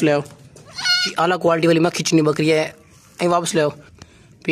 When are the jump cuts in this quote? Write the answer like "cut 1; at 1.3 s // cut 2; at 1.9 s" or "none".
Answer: cut 1; at 1.0 s